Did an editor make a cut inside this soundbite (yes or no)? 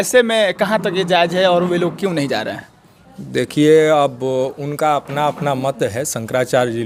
no